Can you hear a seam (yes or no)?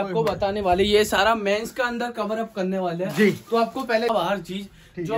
yes